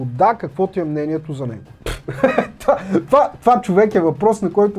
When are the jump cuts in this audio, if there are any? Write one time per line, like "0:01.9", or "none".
0:01.7